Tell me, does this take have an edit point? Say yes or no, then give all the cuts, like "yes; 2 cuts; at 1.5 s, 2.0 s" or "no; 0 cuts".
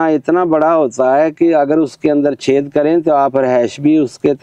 no; 0 cuts